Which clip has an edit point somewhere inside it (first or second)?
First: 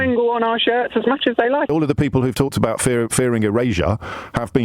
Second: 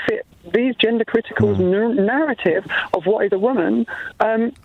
first